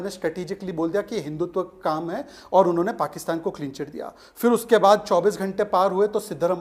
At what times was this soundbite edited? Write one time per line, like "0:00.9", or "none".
none